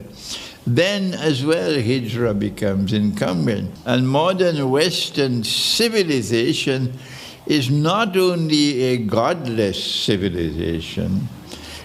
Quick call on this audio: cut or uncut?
cut